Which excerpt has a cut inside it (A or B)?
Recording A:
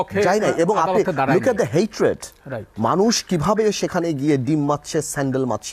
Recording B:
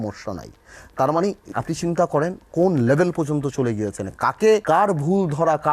B